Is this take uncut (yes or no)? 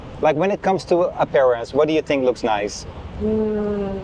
yes